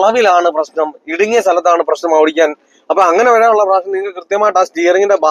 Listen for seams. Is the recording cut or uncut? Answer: uncut